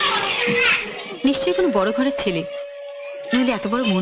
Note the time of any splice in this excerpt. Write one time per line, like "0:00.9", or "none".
none